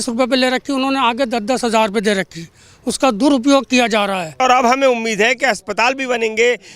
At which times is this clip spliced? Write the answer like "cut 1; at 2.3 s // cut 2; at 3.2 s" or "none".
cut 1; at 4.4 s